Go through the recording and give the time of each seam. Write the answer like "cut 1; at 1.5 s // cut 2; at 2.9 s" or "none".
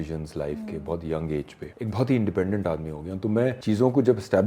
cut 1; at 1.6 s // cut 2; at 3.6 s